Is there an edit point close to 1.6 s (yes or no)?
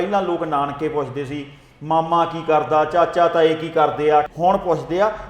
no